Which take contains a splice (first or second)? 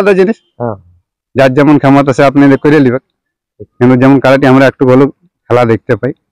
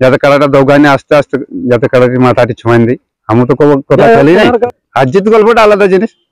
second